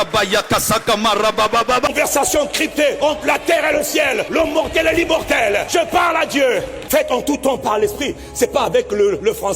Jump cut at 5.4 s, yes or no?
no